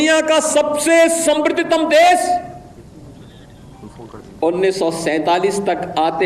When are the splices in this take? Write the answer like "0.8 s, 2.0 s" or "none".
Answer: none